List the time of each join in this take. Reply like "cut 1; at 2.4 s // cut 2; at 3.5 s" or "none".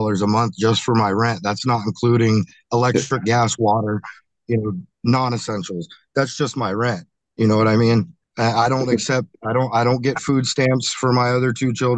none